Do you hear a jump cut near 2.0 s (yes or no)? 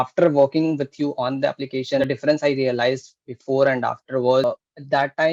yes